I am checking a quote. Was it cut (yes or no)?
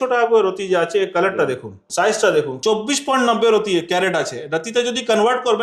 yes